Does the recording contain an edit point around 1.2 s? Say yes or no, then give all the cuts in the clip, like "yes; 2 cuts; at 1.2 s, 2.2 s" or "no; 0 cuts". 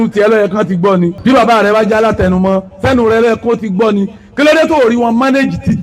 yes; 1 cut; at 1.2 s